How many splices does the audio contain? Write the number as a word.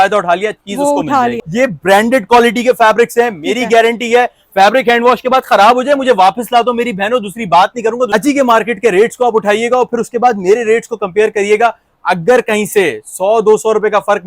two